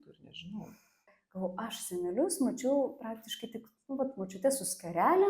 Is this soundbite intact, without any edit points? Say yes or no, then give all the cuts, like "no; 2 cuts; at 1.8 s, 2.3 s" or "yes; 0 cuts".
no; 1 cut; at 1.1 s